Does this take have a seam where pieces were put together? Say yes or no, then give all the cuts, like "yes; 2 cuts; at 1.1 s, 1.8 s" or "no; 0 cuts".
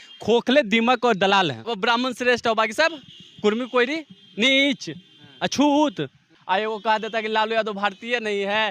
yes; 2 cuts; at 1.6 s, 6.3 s